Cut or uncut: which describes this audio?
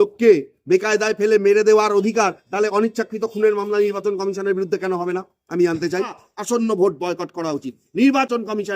cut